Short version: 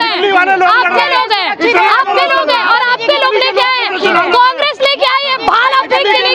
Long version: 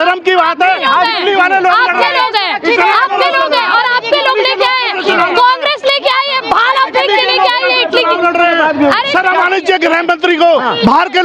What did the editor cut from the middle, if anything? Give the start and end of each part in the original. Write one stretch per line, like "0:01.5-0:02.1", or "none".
none